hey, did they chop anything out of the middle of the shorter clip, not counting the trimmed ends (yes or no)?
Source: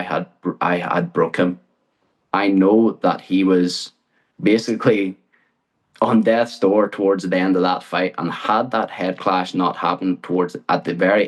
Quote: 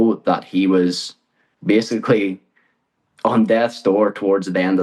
no